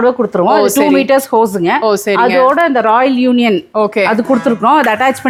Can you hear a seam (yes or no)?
no